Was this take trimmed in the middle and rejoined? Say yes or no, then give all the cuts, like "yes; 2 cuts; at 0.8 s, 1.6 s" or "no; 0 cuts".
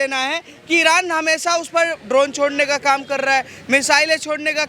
no; 0 cuts